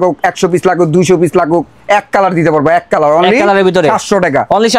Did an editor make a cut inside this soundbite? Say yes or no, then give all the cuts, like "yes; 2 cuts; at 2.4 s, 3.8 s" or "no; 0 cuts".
no; 0 cuts